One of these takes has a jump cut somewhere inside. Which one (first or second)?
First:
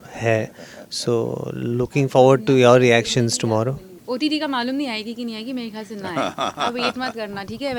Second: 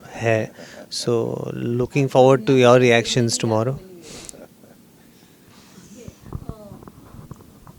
first